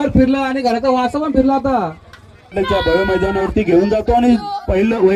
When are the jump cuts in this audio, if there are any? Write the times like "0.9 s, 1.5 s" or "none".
2.5 s